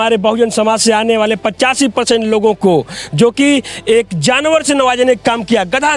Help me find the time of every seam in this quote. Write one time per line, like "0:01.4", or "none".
none

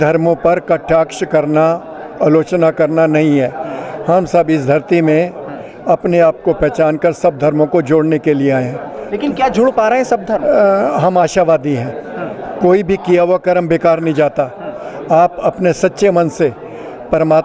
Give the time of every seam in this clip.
none

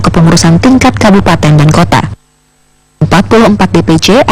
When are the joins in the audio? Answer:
0:02.4

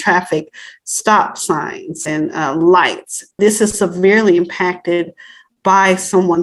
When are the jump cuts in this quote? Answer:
none

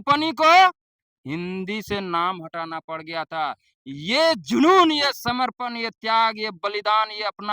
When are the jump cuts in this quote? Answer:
none

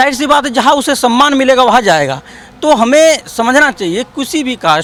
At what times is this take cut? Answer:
none

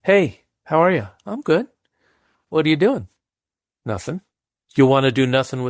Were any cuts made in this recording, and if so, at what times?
0:04.6

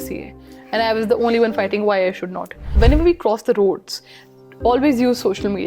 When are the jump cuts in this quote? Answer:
0:02.7

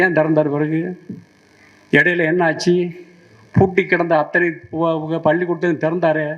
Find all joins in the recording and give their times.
none

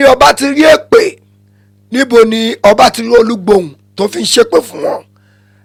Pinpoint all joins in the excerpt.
none

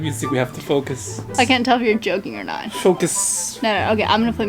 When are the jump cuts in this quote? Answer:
none

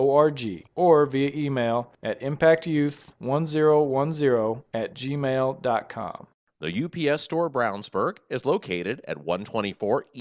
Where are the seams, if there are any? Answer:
0:06.3

